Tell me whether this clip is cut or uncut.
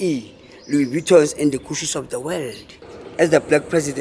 cut